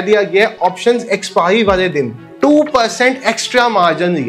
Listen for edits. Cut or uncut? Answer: uncut